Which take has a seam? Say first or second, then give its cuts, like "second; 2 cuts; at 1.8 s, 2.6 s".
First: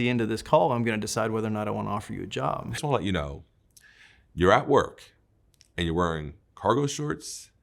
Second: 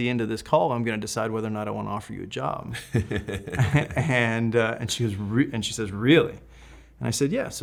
first; 1 cut; at 2.8 s